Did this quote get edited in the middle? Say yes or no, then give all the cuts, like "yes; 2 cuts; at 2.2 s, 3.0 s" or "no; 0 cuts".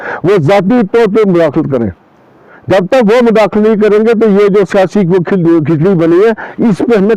no; 0 cuts